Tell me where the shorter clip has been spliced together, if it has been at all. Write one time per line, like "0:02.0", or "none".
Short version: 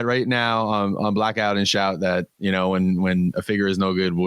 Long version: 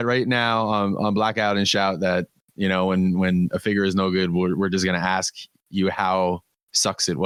0:02.3